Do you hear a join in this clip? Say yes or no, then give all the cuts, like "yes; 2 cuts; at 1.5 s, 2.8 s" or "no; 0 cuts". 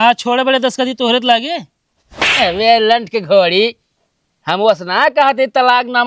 no; 0 cuts